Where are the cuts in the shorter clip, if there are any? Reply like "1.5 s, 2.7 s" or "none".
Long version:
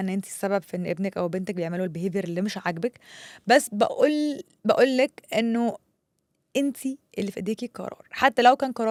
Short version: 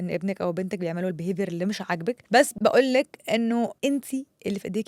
2.4 s, 3.7 s